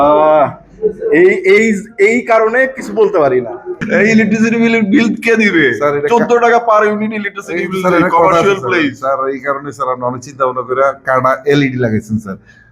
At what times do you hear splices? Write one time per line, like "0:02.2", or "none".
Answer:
0:03.8